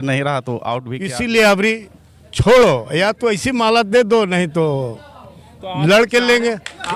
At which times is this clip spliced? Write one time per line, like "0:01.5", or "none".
0:00.9